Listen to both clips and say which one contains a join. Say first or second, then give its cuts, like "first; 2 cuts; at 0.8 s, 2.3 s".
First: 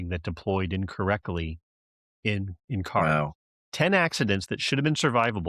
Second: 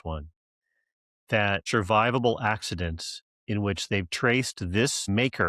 second; 1 cut; at 1.6 s